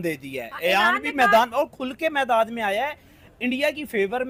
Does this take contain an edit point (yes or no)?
no